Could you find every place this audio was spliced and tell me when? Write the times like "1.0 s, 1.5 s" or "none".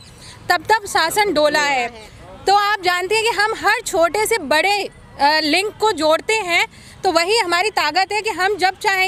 none